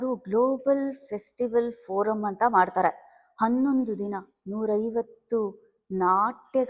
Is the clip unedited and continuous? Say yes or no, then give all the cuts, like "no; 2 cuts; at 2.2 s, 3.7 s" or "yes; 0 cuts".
yes; 0 cuts